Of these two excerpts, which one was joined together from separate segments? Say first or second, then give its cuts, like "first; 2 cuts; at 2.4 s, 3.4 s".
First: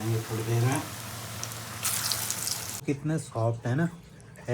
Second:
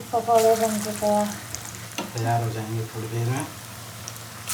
first; 1 cut; at 2.8 s